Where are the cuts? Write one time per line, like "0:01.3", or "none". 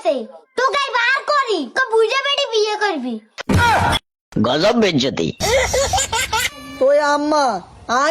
0:03.4
0:06.6